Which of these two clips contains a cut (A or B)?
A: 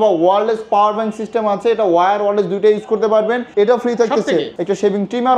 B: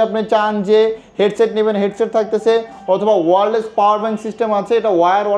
A